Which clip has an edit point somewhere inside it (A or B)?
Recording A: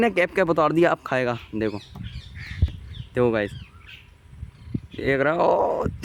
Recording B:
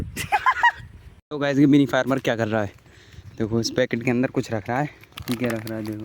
B